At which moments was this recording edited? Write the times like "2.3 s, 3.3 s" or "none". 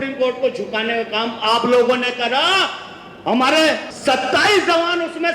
3.9 s

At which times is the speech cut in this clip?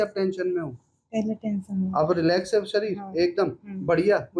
none

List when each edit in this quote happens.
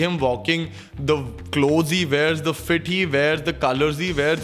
none

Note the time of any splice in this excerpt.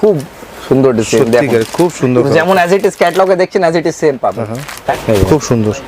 4.8 s

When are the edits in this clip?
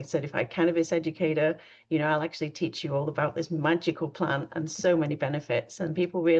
none

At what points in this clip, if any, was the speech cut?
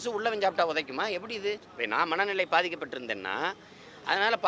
1.7 s

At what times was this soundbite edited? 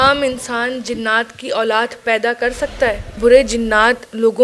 3.2 s

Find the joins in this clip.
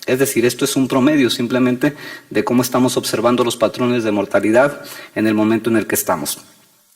2.2 s

